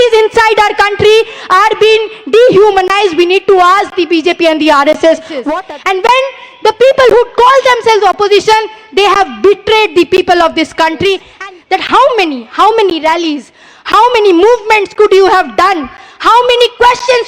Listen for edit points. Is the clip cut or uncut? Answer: cut